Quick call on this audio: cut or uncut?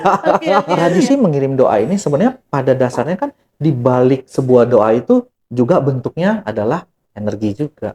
cut